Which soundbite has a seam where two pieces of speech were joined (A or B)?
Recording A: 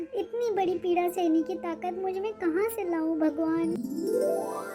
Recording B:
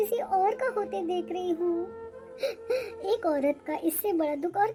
A